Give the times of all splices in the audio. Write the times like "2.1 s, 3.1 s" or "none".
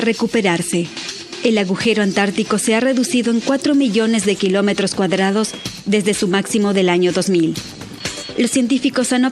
none